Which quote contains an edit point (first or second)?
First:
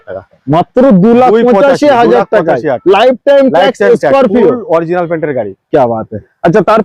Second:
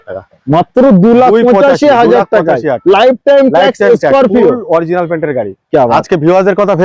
second